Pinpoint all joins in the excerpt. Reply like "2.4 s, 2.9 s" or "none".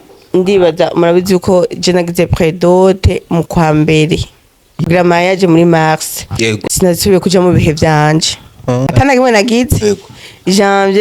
4.8 s, 6.6 s, 8.9 s